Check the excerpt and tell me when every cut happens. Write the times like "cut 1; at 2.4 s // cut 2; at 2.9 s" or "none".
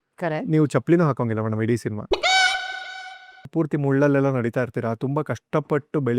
cut 1; at 3.5 s